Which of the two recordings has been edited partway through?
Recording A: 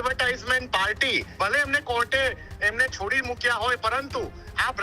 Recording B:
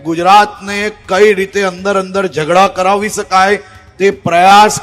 A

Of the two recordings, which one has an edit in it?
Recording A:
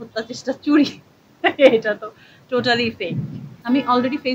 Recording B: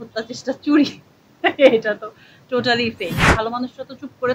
B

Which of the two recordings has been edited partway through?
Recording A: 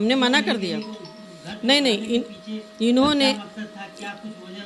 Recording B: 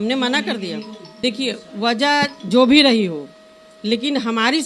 B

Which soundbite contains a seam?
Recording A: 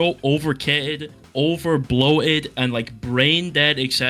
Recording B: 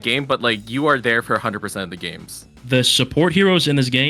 B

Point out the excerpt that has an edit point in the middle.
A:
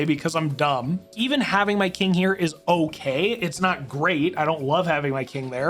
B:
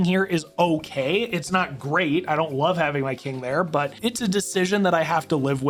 A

